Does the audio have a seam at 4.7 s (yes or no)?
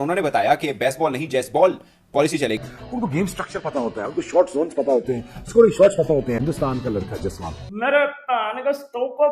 no